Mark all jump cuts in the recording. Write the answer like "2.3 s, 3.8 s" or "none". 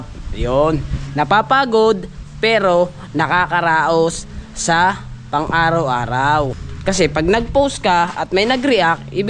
6.6 s

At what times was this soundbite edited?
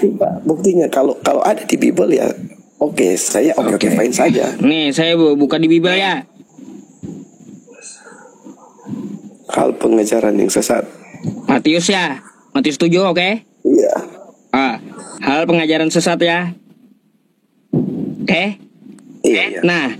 6.4 s

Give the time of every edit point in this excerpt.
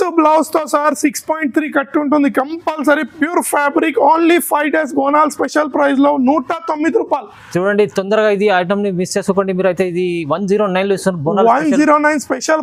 none

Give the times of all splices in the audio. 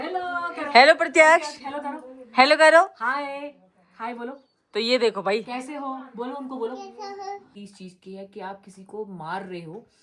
7.6 s

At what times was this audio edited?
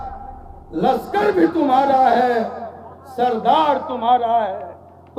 none

